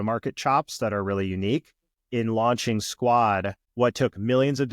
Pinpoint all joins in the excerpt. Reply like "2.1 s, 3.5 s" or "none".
2.0 s